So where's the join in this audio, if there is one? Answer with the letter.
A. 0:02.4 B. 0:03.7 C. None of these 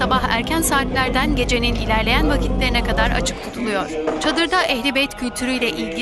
C